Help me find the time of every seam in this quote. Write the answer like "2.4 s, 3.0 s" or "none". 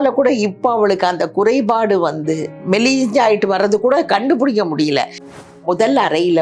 2.6 s, 5.5 s